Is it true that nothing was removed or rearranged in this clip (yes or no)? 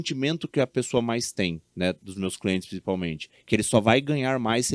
yes